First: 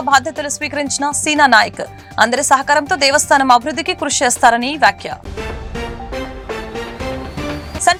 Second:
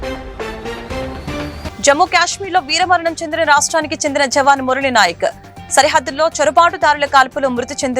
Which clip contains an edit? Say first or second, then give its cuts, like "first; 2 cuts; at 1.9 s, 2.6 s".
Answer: second; 1 cut; at 1.7 s